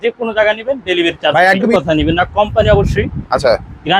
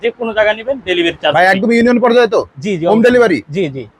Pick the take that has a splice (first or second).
first